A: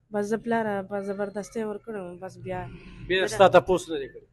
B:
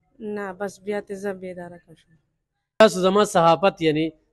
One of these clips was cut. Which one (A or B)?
B